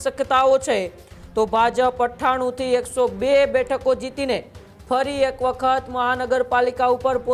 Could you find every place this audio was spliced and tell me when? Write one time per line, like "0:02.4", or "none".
none